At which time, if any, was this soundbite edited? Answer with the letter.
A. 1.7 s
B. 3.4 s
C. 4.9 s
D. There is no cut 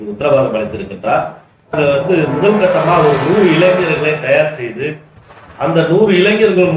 A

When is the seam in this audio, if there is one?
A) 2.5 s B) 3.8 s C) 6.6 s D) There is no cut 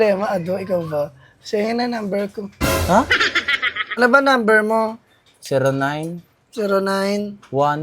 B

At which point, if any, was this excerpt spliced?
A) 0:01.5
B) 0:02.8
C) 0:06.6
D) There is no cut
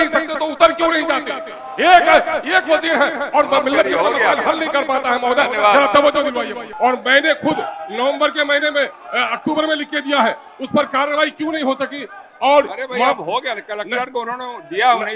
C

